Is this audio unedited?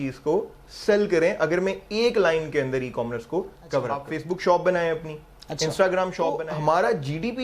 no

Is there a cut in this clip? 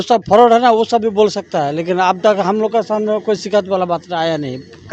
no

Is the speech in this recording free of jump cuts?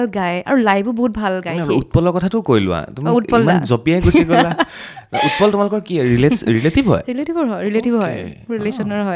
yes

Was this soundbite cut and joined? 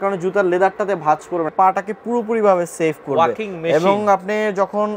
yes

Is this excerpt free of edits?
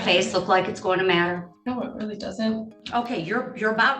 no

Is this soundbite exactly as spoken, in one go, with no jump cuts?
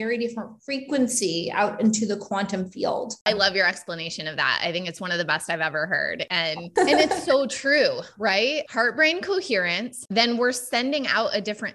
no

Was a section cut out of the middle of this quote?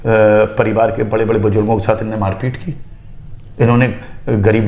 no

